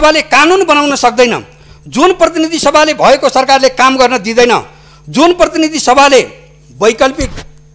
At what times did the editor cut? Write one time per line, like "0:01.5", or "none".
none